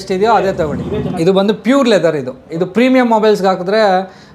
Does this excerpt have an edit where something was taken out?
yes; 2 cuts; at 1.1 s, 2.5 s

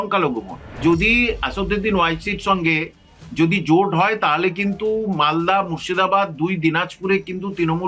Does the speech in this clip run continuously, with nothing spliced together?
no; 2 cuts; at 0.8 s, 3.2 s

